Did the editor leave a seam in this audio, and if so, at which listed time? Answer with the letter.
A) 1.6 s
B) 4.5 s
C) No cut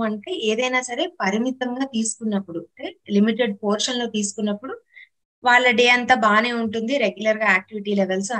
C